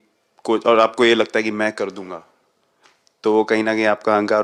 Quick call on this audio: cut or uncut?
uncut